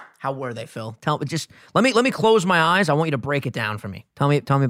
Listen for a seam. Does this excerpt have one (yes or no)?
no